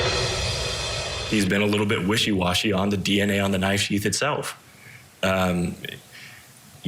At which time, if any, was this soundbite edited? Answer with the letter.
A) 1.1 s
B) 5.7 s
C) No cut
A